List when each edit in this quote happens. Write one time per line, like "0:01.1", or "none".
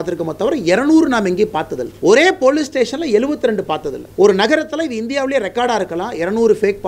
0:01.8
0:04.0

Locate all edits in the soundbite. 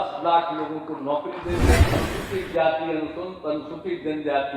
0:01.9

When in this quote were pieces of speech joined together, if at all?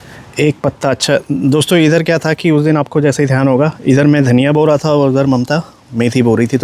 none

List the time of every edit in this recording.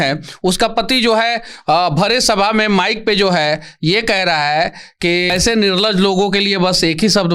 0:05.3

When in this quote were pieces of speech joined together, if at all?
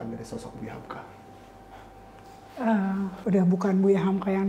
0:03.2

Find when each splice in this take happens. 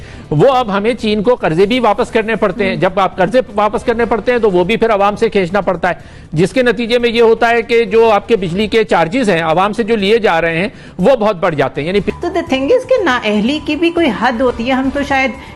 0:12.1

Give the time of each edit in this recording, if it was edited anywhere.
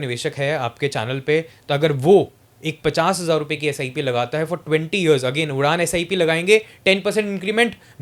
none

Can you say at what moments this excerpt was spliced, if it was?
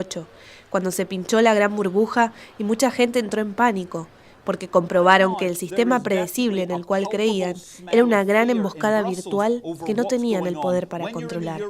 0:05.6

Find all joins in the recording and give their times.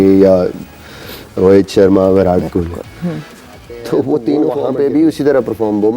0:04.6

